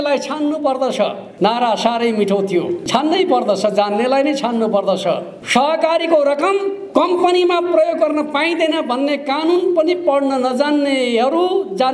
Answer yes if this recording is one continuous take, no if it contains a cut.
no